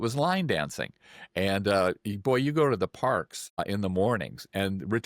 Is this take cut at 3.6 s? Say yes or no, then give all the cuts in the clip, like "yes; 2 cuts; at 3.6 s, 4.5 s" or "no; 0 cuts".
yes; 1 cut; at 3.6 s